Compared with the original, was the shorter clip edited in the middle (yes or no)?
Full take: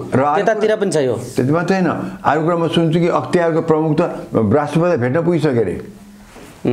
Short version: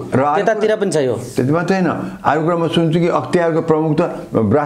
no